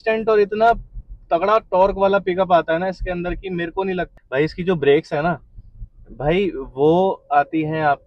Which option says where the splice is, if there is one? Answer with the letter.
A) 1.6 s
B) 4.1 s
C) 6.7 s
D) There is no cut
B